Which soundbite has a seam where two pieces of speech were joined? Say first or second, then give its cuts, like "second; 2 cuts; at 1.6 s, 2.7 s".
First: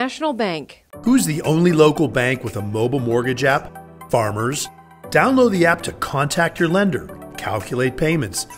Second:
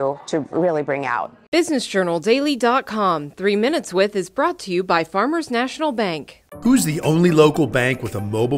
second; 1 cut; at 1.3 s